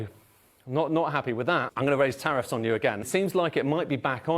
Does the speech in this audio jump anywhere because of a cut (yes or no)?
yes